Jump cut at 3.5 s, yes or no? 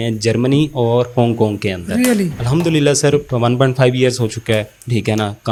no